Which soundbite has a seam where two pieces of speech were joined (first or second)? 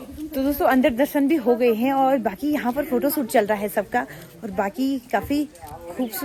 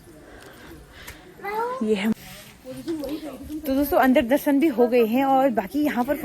second